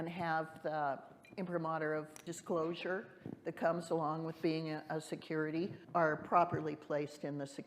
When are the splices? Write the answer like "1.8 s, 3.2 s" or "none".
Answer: 2.3 s, 5.8 s